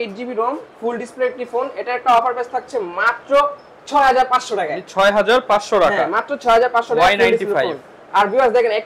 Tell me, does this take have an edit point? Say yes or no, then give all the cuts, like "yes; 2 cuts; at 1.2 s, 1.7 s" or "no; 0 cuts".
no; 0 cuts